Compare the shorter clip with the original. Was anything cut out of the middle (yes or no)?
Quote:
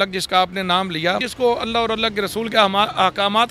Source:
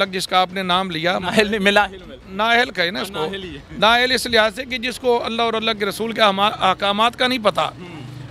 yes